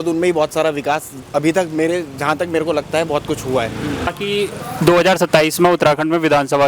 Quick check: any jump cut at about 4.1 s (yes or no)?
yes